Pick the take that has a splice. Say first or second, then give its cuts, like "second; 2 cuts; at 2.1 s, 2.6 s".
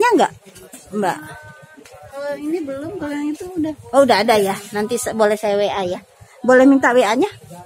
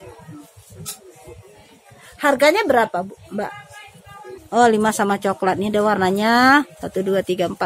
second; 1 cut; at 4.4 s